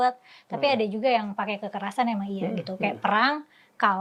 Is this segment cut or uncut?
uncut